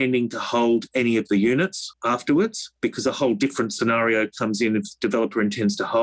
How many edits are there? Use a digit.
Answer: 2